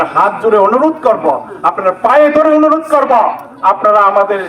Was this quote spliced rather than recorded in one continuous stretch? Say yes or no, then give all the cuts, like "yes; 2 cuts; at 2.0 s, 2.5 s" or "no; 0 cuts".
no; 0 cuts